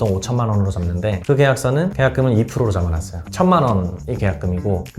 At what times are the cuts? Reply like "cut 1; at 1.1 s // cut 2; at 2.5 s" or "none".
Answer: cut 1; at 3.2 s